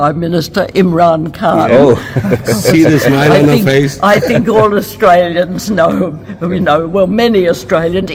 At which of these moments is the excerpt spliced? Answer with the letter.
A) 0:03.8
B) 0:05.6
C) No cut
C